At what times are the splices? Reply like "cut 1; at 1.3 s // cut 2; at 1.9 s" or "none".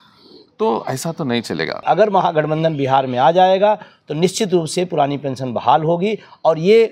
cut 1; at 1.8 s